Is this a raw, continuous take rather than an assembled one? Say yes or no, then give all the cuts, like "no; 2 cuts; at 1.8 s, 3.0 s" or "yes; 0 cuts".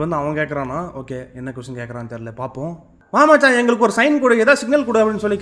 no; 1 cut; at 2.9 s